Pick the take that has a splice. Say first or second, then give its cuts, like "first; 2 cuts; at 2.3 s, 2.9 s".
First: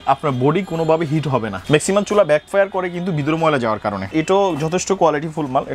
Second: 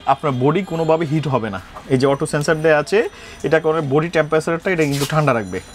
first; 2 cuts; at 1.6 s, 4.1 s